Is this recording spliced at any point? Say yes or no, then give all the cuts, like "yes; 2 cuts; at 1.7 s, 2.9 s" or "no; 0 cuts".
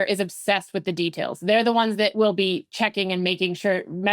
yes; 1 cut; at 2.1 s